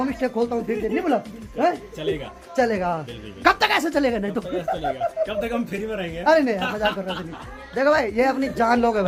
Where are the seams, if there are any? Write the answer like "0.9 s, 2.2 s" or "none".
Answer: none